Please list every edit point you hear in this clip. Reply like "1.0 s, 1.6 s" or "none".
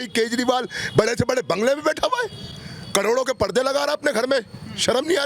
none